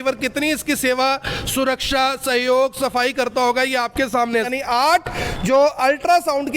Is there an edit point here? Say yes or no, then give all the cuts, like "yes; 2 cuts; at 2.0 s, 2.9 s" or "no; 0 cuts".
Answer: yes; 1 cut; at 4.5 s